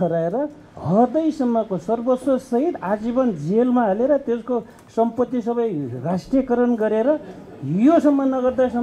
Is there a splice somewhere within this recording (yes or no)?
no